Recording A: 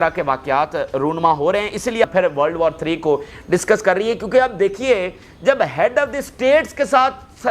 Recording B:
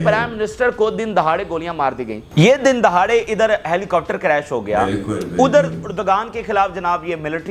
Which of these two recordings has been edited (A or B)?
A